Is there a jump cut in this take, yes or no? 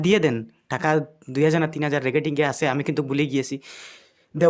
no